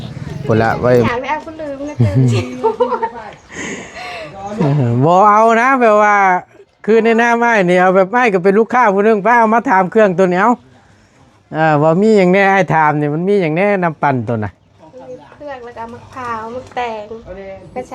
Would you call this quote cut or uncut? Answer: cut